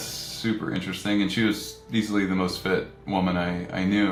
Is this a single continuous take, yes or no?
yes